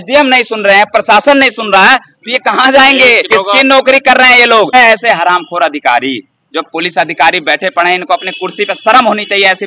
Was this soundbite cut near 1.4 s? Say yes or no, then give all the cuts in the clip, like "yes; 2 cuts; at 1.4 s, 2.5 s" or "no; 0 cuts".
no; 2 cuts; at 3.2 s, 4.7 s